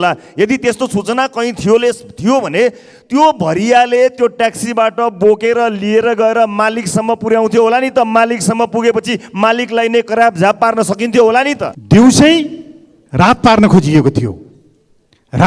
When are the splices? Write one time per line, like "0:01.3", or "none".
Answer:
0:11.7